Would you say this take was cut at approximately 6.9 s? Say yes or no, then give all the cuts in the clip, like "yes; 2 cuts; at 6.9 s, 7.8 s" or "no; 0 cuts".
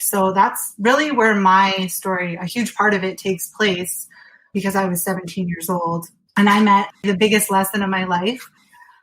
yes; 3 cuts; at 4.5 s, 6.2 s, 6.9 s